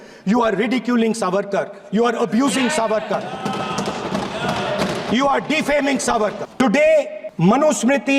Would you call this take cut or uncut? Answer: cut